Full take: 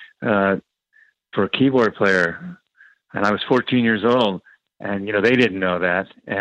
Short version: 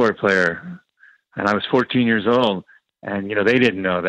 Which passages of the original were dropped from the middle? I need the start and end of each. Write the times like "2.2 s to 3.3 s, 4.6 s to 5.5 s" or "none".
none